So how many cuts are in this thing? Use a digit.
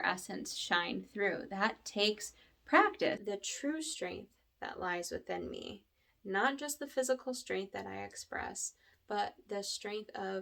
1